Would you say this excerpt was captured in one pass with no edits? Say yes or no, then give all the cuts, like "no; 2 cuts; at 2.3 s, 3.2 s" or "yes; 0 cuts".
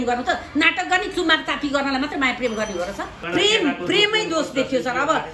no; 1 cut; at 3.2 s